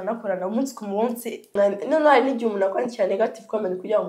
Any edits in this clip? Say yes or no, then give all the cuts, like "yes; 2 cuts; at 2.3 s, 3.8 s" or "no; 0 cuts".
yes; 1 cut; at 1.5 s